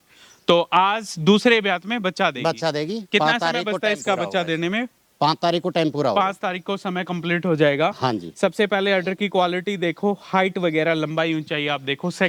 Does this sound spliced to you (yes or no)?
no